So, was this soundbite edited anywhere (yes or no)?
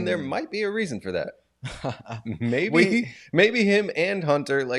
no